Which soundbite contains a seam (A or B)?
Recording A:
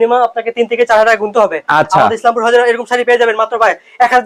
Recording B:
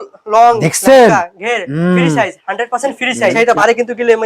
B